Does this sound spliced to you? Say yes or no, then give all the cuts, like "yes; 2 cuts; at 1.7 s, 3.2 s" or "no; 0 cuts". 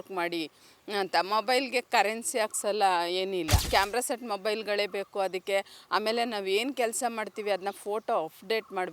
yes; 1 cut; at 3.6 s